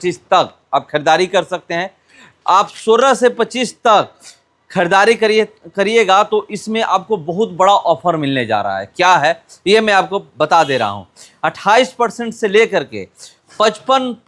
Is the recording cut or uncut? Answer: uncut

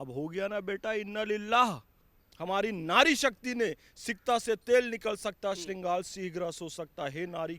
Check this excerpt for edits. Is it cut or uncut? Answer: cut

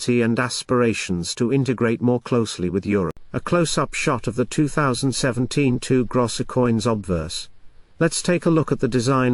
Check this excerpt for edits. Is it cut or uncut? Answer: cut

